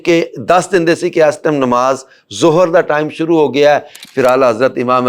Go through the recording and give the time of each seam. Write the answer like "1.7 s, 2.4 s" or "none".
none